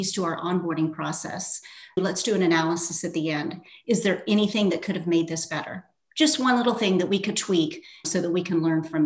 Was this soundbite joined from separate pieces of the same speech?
yes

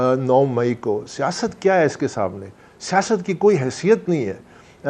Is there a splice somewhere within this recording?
no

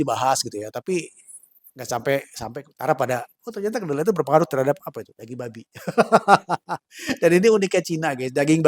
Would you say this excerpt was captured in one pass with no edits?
yes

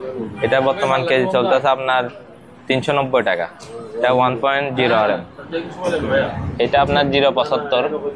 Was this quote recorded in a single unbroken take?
yes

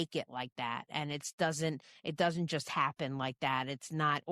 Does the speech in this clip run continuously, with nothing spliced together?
yes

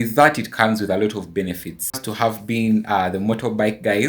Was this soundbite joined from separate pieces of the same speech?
yes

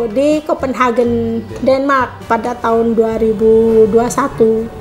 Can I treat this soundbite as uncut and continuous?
no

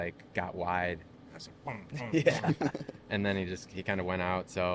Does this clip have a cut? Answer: no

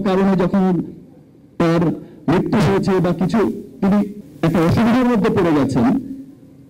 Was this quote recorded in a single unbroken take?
no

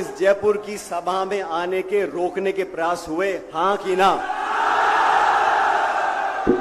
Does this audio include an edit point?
no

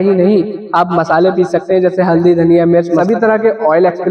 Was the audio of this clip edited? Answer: yes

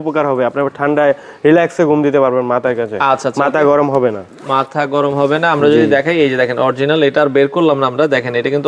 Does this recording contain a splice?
no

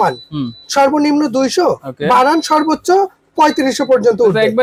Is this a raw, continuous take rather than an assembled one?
yes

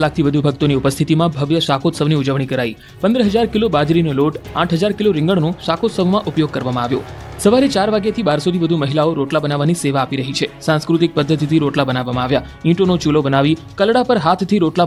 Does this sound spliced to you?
no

